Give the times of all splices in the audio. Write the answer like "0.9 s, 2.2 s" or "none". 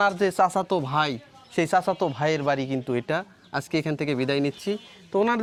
none